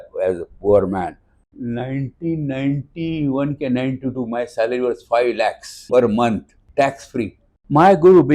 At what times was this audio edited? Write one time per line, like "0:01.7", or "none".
0:01.5
0:07.4